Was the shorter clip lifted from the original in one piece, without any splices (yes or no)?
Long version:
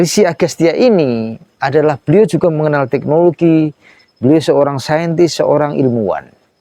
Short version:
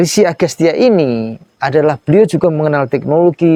yes